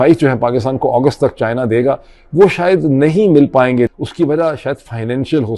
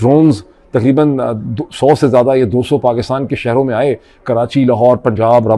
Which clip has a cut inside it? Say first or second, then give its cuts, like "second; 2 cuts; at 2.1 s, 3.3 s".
first; 1 cut; at 3.9 s